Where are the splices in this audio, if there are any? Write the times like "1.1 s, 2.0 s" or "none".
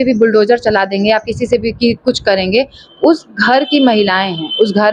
none

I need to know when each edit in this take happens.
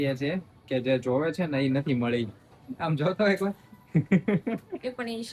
none

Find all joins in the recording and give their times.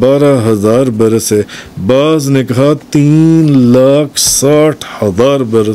none

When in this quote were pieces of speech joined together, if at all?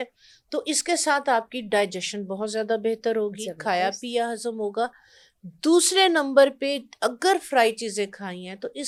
none

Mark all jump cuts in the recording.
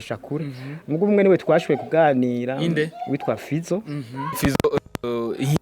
4.4 s

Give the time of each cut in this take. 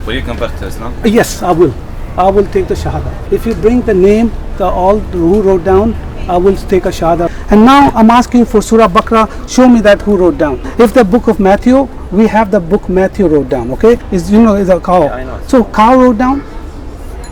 3.1 s, 7.3 s, 10.6 s, 14.1 s

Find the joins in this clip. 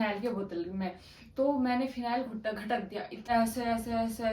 3.1 s

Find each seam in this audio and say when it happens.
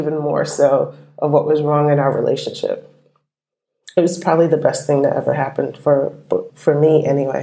6.5 s

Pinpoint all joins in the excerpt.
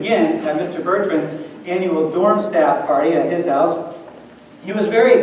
1.0 s

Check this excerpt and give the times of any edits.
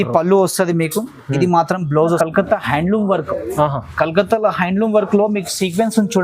2.2 s

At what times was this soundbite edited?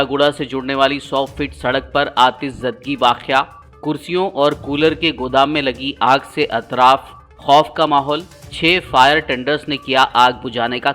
none

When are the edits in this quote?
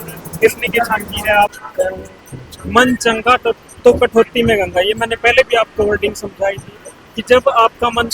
1.6 s

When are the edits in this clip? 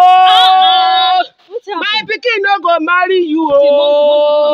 none

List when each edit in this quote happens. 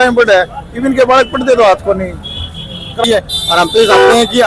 3.0 s

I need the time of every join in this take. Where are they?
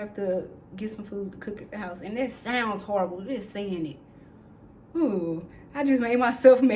none

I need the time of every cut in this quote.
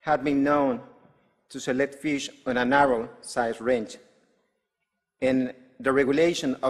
none

